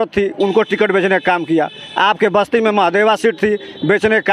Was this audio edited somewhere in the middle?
no; 0 cuts

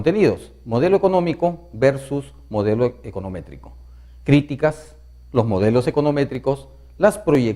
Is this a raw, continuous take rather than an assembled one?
no; 1 cut; at 3.8 s

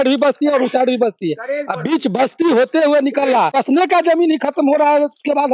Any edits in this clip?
yes; 1 cut; at 3.5 s

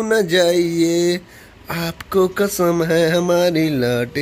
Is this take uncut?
yes; 0 cuts

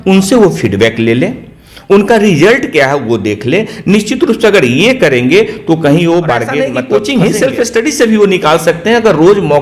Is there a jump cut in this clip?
yes; 1 cut; at 6.7 s

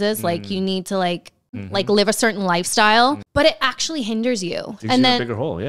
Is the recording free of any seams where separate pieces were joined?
no; 2 cuts; at 1.6 s, 3.2 s

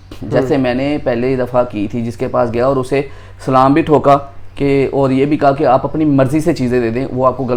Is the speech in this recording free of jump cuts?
yes; 0 cuts

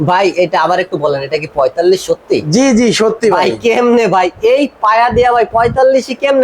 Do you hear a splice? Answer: no; 0 cuts

